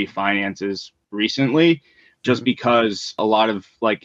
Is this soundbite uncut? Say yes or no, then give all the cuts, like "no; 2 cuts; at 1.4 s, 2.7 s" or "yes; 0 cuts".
no; 2 cuts; at 2.2 s, 3.2 s